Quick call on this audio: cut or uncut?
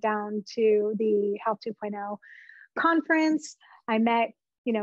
uncut